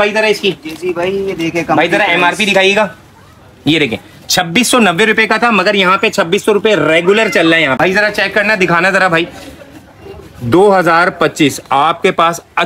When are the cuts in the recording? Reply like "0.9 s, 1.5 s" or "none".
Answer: none